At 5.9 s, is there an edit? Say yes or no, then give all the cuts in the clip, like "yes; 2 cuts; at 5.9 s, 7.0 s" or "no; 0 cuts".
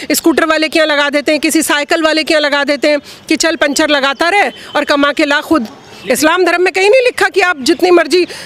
yes; 1 cut; at 5.9 s